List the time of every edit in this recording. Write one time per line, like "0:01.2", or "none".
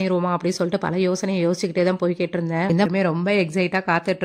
0:02.9